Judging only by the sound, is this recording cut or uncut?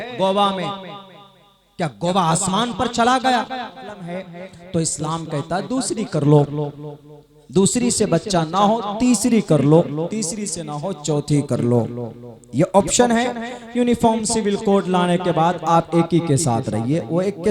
cut